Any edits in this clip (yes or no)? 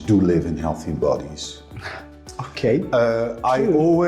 no